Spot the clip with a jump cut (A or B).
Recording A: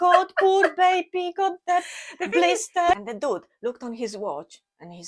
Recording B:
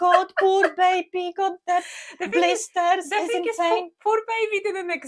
A